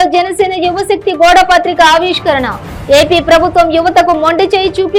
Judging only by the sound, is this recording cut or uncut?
uncut